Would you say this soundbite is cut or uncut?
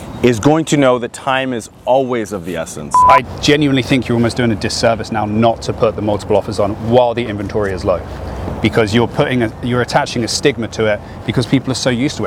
cut